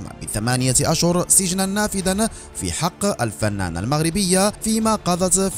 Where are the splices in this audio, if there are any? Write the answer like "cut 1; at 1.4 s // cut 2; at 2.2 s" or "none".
none